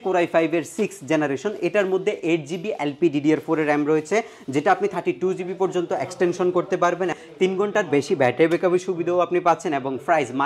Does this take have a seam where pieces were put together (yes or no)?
yes